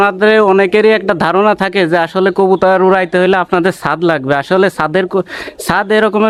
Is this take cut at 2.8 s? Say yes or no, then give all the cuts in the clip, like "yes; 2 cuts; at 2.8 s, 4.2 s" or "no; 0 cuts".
no; 0 cuts